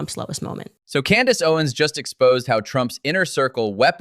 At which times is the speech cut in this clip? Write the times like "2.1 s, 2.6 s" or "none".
none